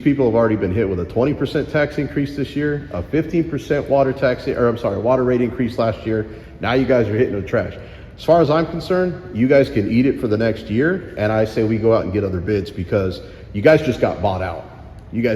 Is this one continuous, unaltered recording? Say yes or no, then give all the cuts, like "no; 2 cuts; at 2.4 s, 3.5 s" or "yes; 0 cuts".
yes; 0 cuts